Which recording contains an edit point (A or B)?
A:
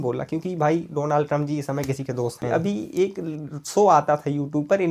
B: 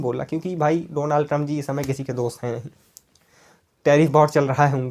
A